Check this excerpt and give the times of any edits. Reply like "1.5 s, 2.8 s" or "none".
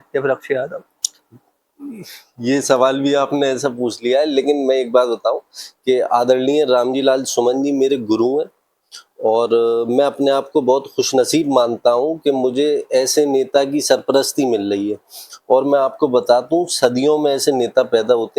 none